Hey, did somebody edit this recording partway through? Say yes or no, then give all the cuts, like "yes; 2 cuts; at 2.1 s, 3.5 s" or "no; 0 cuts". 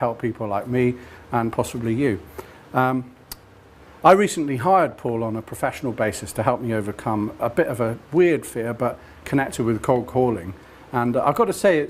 yes; 1 cut; at 8.5 s